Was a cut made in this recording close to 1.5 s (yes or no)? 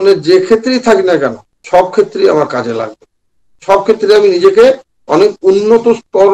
yes